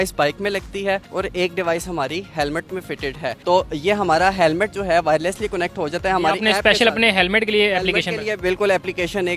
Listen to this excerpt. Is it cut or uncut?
uncut